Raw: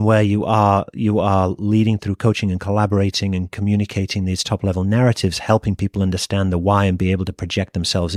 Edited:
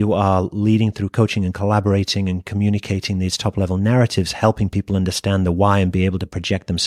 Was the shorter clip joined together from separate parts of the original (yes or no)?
no